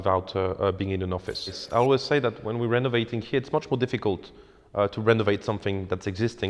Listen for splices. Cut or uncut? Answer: cut